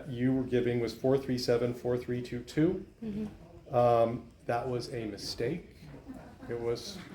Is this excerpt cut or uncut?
uncut